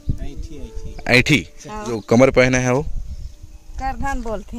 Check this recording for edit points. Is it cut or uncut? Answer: cut